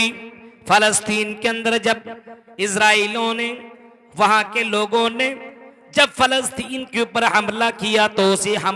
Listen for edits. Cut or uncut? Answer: uncut